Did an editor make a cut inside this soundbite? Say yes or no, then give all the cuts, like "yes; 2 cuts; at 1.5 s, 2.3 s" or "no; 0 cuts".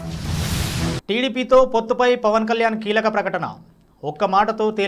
yes; 1 cut; at 1.0 s